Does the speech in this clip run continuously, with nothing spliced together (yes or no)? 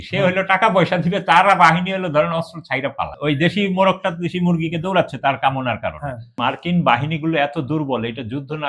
no